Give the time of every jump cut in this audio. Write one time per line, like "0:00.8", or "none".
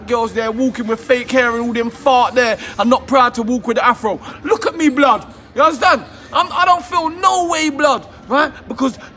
none